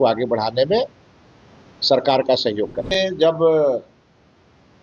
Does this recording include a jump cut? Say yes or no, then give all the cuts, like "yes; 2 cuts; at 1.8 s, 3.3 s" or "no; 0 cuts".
yes; 1 cut; at 3.0 s